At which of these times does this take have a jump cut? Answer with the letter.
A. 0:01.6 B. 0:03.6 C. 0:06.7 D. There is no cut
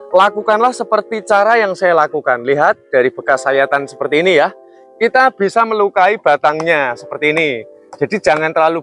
D